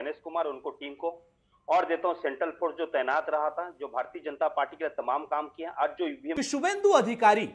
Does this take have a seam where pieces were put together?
yes; 1 cut; at 6.2 s

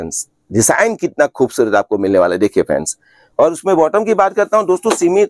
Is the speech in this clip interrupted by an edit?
no; 0 cuts

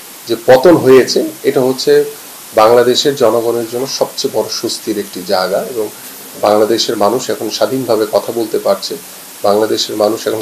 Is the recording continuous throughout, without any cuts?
yes; 0 cuts

